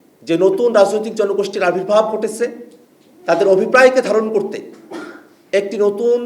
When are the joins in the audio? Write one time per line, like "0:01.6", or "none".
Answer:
none